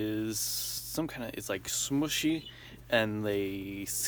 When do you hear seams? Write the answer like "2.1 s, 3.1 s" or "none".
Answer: none